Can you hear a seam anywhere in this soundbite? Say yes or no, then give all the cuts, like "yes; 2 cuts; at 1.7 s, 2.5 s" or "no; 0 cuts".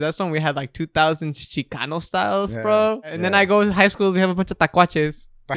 yes; 1 cut; at 3.1 s